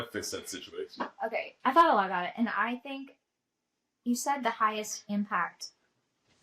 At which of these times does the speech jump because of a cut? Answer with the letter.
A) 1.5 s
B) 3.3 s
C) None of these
A